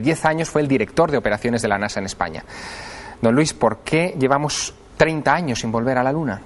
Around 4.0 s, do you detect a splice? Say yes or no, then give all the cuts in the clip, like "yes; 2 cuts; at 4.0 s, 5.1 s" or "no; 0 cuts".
no; 1 cut; at 2.1 s